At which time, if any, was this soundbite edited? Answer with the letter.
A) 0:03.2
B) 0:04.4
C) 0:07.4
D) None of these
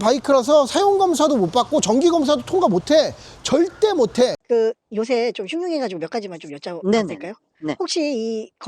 B